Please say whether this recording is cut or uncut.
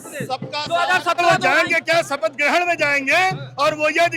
cut